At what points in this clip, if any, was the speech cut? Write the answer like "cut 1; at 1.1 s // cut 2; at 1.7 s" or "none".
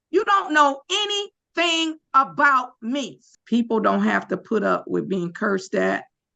cut 1; at 3.2 s